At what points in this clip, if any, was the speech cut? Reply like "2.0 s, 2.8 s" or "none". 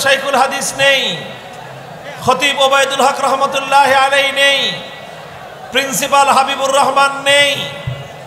none